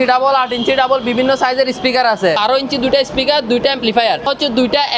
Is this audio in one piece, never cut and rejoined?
no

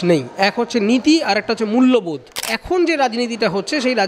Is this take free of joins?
no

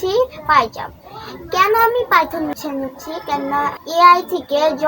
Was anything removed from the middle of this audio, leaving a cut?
yes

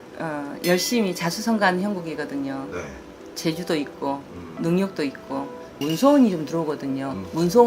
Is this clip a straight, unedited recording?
no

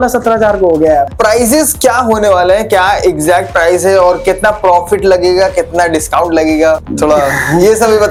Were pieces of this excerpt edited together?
no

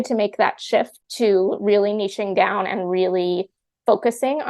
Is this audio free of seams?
no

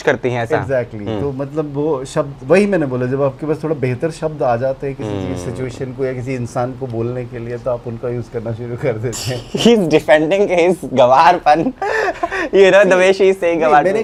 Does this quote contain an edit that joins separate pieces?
no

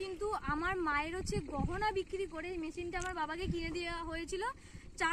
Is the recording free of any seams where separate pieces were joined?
yes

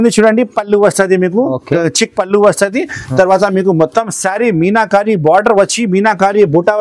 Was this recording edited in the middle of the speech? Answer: no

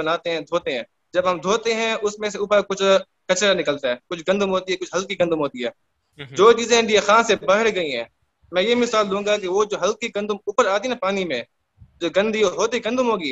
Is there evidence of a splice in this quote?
no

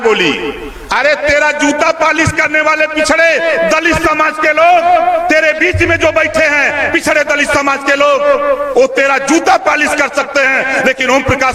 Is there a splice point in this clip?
no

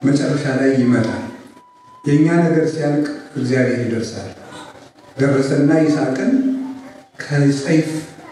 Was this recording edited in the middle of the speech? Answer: no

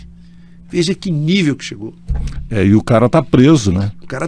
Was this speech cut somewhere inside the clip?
no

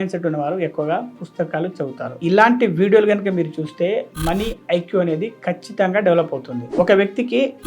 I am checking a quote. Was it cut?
yes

